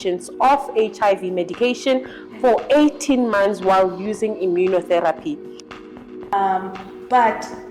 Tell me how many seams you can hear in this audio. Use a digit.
1